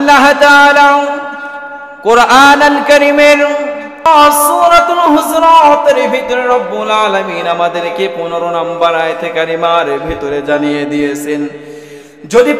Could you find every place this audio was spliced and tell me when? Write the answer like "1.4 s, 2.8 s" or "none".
4.1 s